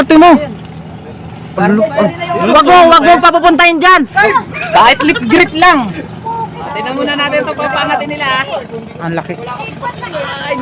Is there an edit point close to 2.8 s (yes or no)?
no